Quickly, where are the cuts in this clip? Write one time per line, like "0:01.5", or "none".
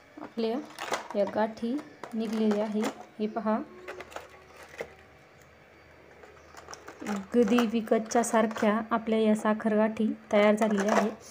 none